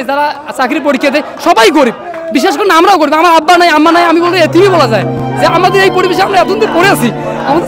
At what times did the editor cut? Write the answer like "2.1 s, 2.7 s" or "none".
none

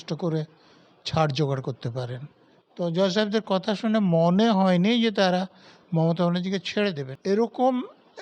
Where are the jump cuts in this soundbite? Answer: 7.1 s

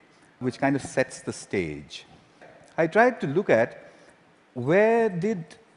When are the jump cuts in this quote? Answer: 4.7 s

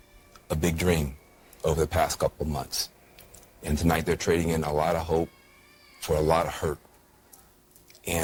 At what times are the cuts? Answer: none

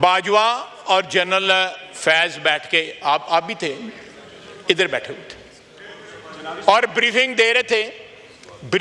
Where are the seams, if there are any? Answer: none

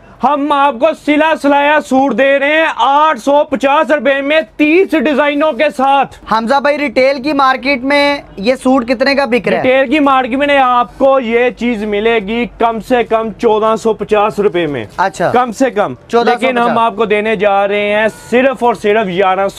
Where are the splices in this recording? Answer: 6.2 s

